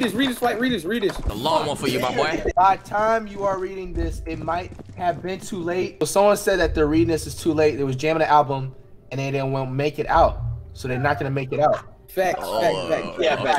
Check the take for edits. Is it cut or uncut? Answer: cut